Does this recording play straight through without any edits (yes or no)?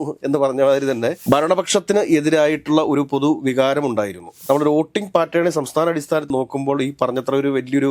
no